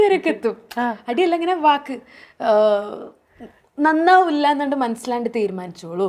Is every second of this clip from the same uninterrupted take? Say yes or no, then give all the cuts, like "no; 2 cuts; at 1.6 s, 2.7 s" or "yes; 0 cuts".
yes; 0 cuts